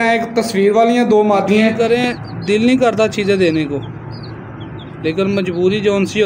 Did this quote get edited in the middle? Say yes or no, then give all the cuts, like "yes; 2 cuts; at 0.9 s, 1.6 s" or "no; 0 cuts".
yes; 1 cut; at 1.7 s